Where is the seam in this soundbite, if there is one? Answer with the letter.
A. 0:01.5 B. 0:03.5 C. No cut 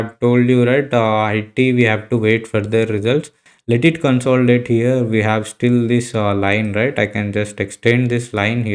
B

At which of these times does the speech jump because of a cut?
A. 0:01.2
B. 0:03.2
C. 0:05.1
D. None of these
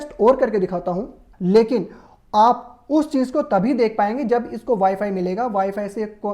A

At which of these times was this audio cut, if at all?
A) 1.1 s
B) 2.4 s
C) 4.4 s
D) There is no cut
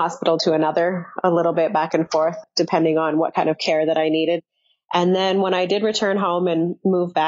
B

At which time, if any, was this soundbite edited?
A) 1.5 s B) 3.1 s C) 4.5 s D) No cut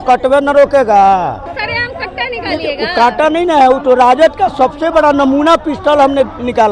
A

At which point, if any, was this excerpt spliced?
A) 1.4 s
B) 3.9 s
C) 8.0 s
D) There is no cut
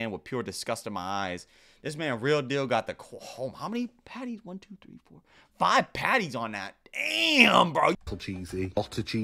C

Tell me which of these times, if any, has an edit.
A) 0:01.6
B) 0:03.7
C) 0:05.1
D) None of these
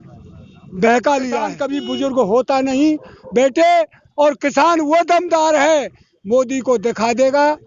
A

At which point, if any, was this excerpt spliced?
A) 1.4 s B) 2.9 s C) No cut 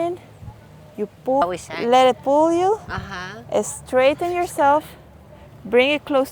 A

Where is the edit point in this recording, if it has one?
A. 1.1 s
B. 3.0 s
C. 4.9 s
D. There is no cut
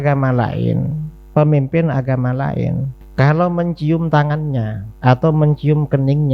B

